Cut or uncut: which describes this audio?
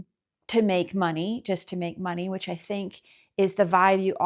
uncut